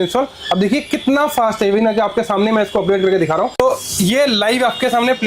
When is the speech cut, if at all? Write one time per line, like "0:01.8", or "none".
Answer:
0:03.5